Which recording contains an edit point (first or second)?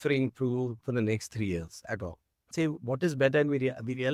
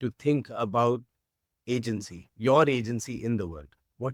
first